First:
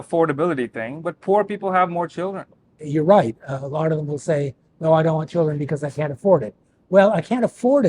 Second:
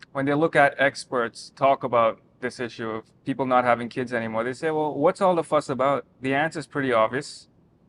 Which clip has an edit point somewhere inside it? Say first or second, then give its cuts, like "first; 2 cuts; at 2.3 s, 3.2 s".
first; 1 cut; at 2.8 s